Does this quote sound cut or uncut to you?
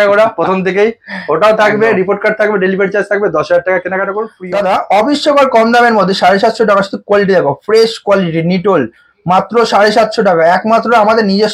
cut